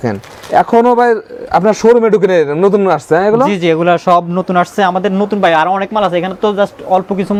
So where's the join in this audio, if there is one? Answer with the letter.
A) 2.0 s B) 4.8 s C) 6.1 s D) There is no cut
D